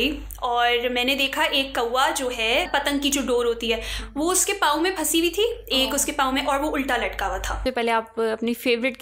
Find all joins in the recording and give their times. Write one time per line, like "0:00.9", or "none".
0:07.6